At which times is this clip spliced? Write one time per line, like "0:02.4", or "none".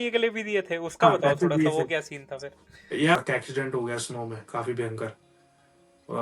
0:03.2